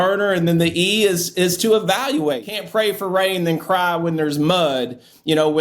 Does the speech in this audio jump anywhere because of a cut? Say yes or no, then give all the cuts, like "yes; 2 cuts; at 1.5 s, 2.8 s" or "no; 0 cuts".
yes; 1 cut; at 2.5 s